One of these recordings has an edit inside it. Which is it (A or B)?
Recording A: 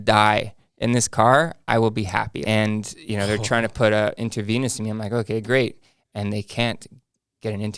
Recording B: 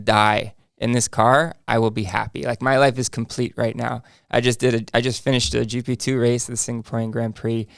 A